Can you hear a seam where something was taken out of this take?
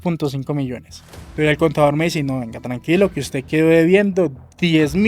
yes; 1 cut; at 0.9 s

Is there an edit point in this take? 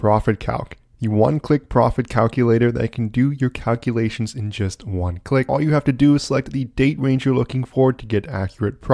yes; 1 cut; at 5.5 s

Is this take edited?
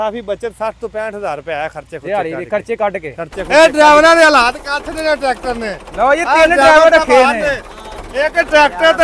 yes; 1 cut; at 3.4 s

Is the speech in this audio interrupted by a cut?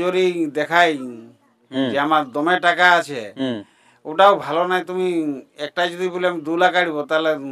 no; 0 cuts

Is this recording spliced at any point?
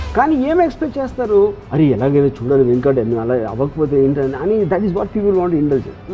no; 0 cuts

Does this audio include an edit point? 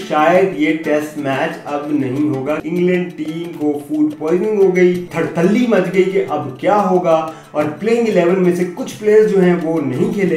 yes; 2 cuts; at 2.6 s, 5.1 s

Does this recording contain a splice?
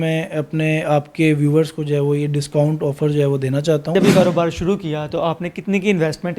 yes; 1 cut; at 3.9 s

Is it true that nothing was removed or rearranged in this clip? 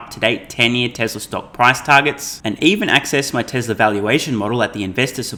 yes; 0 cuts

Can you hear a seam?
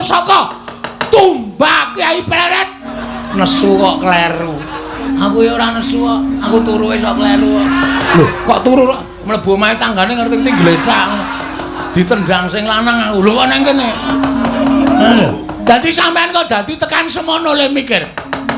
yes; 5 cuts; at 2.9 s, 5.0 s, 6.5 s, 8.1 s, 14.1 s

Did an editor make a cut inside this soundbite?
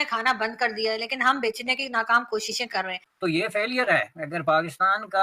yes; 1 cut; at 3.0 s

